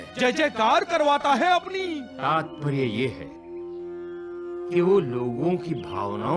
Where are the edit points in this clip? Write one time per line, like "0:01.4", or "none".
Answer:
0:02.1